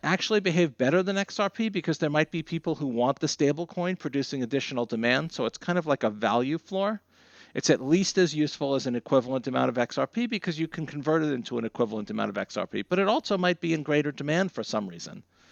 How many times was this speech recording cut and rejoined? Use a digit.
0